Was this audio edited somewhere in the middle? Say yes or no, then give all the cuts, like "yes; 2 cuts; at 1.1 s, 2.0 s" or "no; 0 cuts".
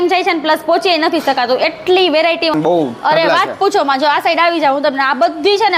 yes; 1 cut; at 2.5 s